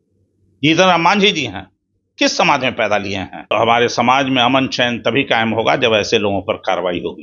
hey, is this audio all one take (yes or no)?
no